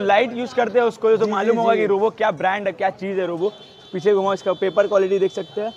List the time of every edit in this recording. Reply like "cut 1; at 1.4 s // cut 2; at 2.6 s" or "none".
none